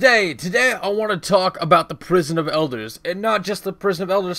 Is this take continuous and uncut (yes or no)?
yes